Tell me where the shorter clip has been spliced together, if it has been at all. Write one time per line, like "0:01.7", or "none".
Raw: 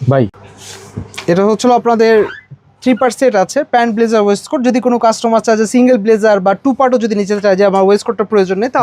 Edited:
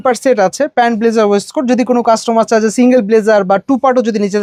none